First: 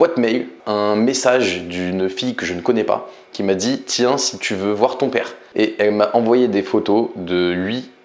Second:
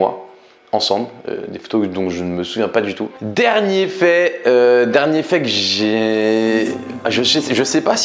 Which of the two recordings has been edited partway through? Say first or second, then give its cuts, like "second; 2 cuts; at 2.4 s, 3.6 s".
second; 1 cut; at 3.3 s